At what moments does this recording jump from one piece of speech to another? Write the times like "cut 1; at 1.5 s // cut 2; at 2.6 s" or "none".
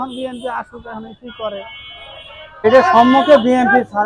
cut 1; at 2.6 s